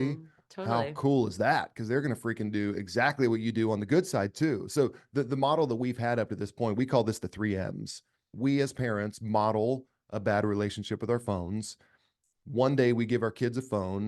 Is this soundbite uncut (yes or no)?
no